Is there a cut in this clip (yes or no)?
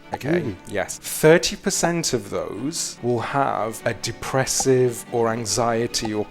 yes